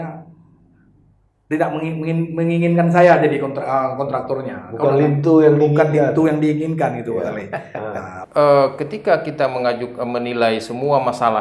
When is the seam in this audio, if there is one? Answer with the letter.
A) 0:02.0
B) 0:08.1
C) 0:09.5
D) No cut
B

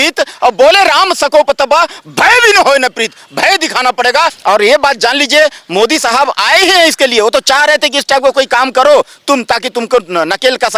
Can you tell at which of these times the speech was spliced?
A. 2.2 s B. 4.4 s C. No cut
B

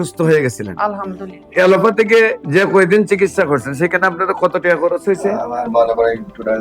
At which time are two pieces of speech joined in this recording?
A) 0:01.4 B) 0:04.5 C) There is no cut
A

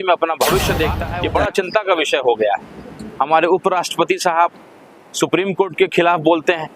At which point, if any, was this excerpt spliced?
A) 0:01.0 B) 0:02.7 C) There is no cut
A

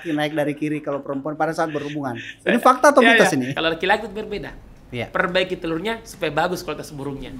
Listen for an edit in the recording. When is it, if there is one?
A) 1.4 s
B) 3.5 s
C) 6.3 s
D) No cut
B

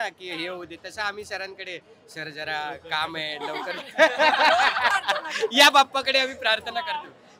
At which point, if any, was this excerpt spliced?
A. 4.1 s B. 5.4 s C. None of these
C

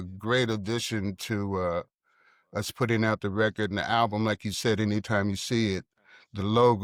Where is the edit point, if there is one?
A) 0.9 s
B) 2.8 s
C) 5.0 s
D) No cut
D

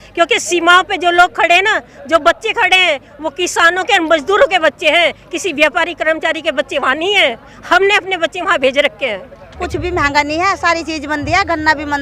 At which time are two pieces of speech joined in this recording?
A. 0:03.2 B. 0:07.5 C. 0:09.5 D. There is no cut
C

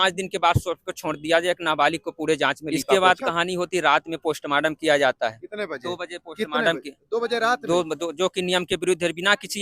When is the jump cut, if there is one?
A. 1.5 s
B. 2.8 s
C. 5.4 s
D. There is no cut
B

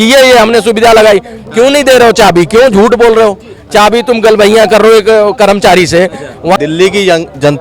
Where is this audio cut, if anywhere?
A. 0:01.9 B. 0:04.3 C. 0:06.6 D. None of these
C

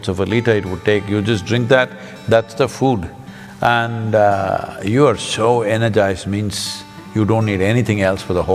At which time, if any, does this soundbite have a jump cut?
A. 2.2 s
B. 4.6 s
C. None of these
C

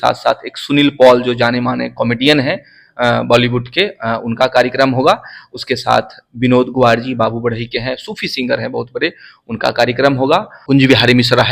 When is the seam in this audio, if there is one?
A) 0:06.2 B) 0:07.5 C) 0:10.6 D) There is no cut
C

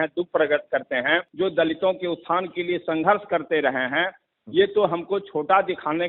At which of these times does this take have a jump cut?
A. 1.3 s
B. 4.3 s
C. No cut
A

